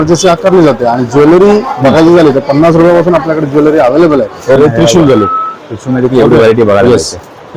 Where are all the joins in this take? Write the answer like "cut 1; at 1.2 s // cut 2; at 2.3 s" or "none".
cut 1; at 4.6 s